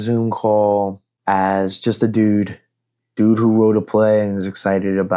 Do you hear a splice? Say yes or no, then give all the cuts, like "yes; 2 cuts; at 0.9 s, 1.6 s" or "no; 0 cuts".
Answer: yes; 1 cut; at 1.1 s